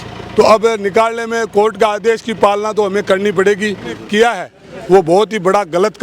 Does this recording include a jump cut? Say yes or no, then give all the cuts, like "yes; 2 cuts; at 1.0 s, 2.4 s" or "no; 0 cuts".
yes; 1 cut; at 4.0 s